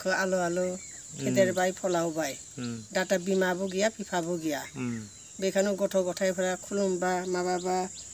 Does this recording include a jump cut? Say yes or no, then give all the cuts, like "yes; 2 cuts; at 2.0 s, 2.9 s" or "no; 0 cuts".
no; 0 cuts